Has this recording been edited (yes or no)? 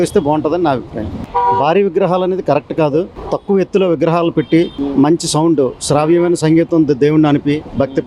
no